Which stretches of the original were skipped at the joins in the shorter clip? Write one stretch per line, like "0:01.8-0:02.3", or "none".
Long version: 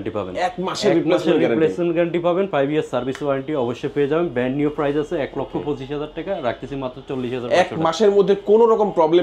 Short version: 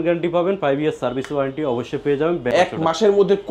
0:04.4-0:07.5